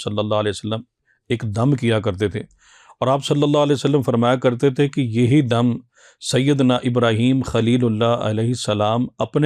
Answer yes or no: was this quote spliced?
no